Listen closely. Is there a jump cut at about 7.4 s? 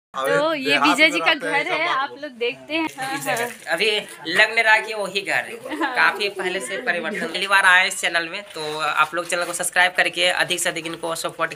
yes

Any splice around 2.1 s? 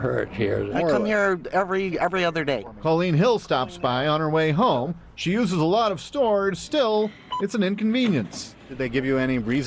no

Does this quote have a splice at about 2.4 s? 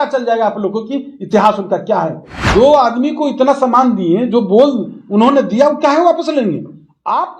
yes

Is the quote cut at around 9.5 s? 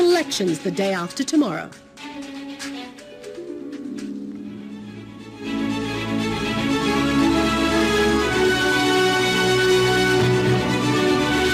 yes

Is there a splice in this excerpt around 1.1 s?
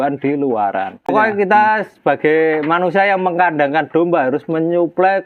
yes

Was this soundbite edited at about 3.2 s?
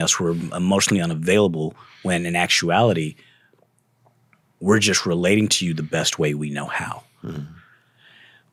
no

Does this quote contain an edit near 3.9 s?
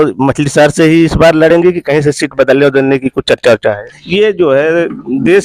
yes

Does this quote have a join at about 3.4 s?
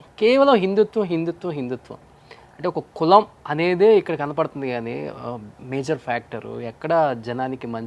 yes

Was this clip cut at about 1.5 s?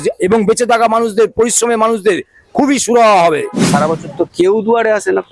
no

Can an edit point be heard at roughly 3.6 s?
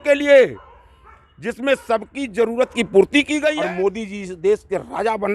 yes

